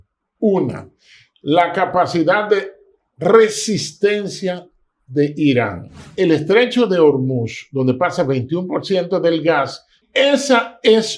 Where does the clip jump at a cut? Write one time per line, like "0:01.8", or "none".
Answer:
0:06.0
0:10.0